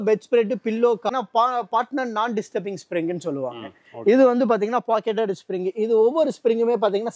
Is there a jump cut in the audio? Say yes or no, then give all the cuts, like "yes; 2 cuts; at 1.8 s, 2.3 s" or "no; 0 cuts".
yes; 1 cut; at 1.1 s